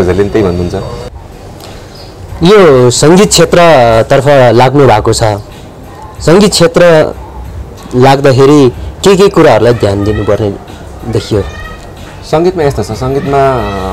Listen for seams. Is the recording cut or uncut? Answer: cut